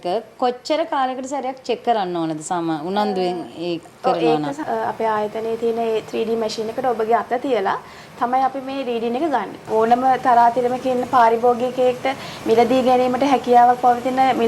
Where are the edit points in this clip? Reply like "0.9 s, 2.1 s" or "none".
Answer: 4.6 s, 9.7 s

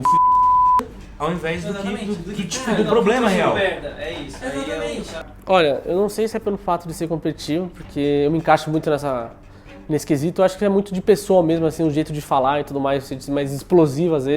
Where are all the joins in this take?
1.0 s, 5.2 s

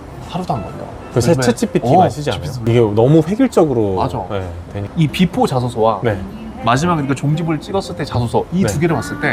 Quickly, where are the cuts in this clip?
2.5 s, 4.9 s

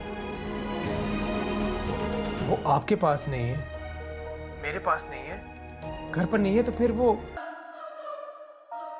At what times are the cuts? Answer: 2.4 s, 7.4 s

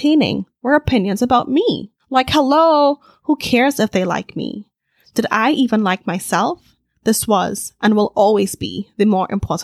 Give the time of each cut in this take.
1.9 s

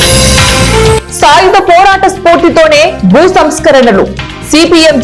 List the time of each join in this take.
1.0 s

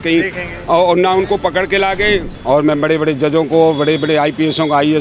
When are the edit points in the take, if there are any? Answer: 2.3 s

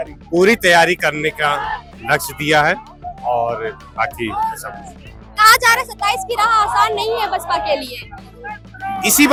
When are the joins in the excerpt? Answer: none

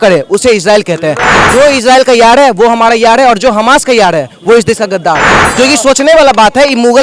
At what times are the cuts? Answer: 1.3 s, 5.4 s

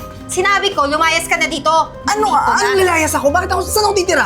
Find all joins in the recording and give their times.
2.0 s

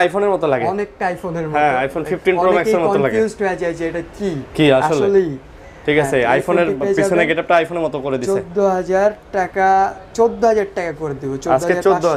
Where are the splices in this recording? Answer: none

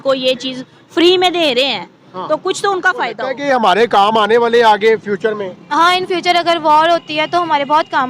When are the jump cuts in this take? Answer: 3.2 s

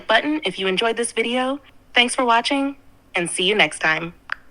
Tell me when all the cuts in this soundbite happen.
1.8 s

